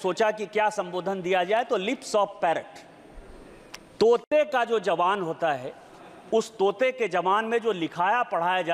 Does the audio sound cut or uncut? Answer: uncut